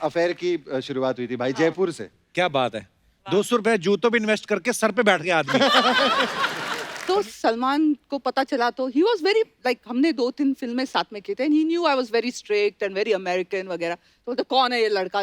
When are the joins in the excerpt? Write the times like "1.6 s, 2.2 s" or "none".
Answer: 6.7 s